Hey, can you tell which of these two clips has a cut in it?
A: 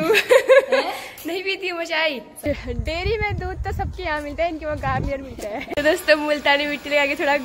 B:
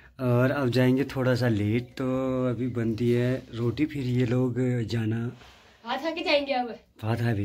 A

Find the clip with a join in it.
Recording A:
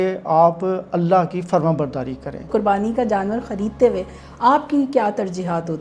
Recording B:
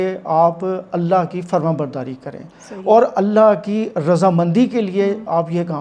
A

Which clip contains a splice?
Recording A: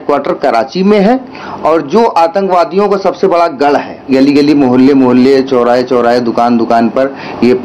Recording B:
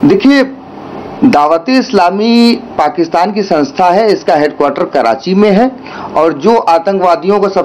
A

